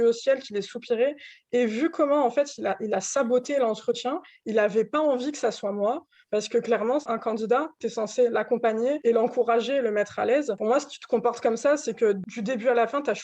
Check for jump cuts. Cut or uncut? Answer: cut